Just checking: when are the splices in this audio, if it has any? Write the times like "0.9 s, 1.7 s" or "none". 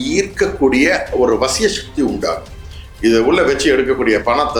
none